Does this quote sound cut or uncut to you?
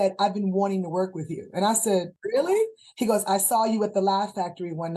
cut